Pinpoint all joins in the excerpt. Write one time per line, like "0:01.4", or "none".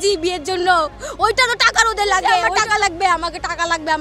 0:02.5